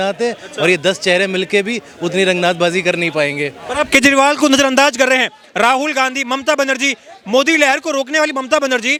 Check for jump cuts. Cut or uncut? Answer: uncut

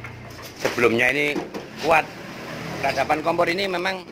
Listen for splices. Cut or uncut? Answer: uncut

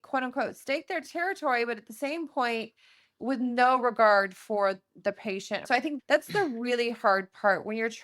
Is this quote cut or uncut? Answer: cut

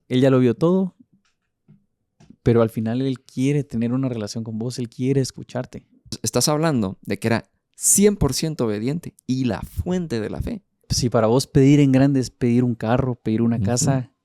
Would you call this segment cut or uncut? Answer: cut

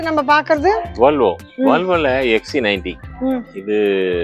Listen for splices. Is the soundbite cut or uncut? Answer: uncut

